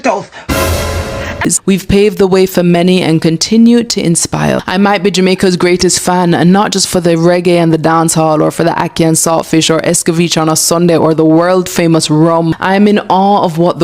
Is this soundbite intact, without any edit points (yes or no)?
no